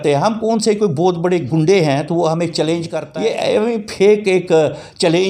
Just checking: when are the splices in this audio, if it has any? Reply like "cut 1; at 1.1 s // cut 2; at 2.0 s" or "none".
cut 1; at 3.0 s